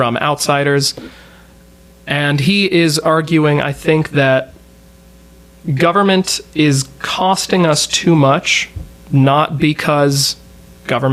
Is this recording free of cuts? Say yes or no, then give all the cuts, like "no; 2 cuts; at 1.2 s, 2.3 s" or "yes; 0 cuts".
yes; 0 cuts